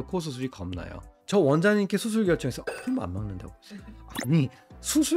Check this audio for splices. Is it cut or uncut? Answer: cut